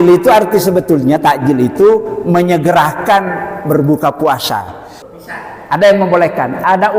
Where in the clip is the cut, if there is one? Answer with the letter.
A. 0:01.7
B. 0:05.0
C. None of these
B